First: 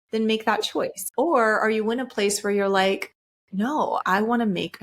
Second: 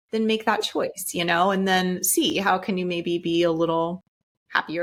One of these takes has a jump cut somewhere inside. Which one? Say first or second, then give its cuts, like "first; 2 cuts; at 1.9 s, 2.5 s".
first; 2 cuts; at 1.0 s, 4.0 s